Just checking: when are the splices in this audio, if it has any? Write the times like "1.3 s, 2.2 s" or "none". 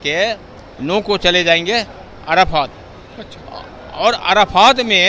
none